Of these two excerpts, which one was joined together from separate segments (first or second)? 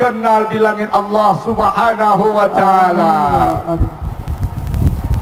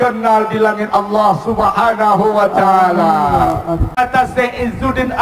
second